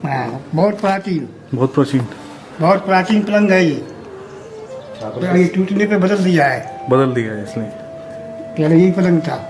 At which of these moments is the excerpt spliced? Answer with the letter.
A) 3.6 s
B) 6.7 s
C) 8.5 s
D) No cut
D